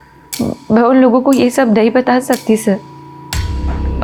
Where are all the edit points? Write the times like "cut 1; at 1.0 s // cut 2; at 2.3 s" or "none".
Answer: none